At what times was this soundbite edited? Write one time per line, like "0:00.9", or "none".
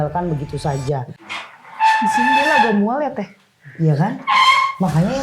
0:01.1